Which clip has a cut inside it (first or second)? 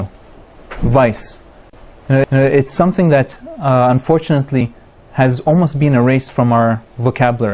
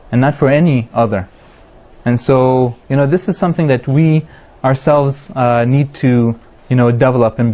second